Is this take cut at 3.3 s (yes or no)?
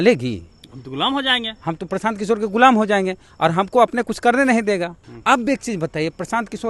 no